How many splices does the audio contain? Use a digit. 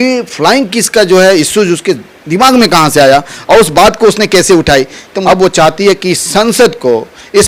1